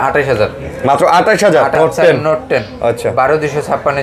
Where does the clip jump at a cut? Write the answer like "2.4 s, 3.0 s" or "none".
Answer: 1.7 s